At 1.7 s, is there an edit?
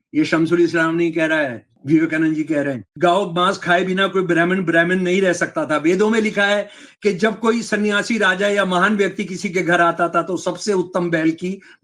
yes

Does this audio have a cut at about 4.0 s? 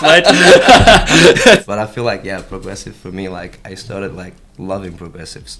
no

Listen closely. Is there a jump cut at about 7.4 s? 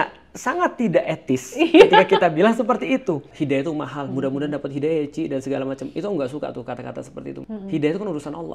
yes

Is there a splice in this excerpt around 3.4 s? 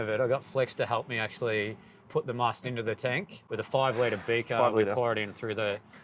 yes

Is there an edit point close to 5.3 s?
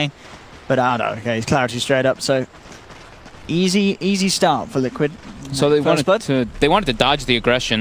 no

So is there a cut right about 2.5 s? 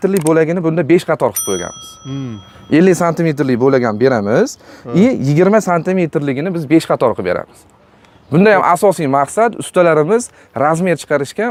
no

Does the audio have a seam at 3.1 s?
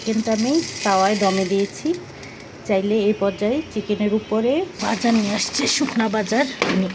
no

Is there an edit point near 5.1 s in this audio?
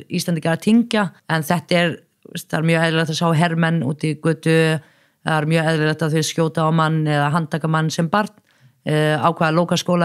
no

